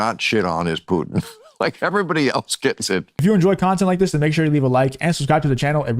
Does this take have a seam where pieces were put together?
yes; 1 cut; at 3.2 s

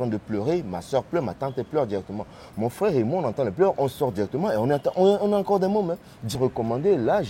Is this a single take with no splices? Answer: no; 1 cut; at 6.4 s

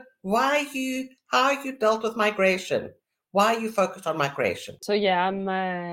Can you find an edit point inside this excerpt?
yes; 1 cut; at 4.8 s

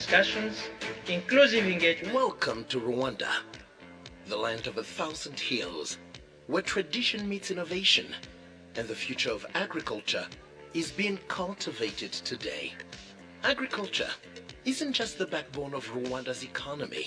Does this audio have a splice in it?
yes; 1 cut; at 2.0 s

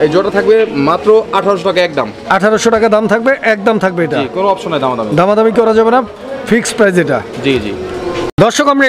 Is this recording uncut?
yes; 0 cuts

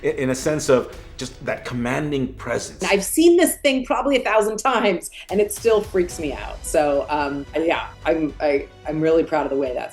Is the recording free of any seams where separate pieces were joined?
no; 2 cuts; at 2.8 s, 8.0 s

